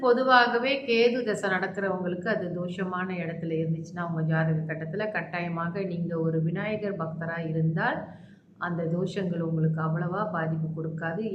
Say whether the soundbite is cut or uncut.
uncut